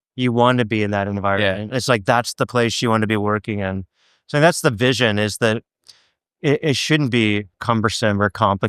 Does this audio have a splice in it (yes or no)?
yes